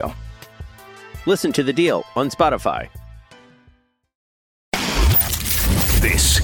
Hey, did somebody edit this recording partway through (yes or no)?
yes